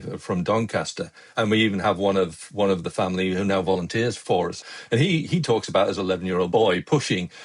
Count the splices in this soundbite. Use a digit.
2